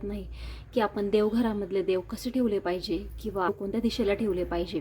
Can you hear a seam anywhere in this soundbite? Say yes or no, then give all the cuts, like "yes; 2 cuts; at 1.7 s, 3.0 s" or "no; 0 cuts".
yes; 1 cut; at 3.5 s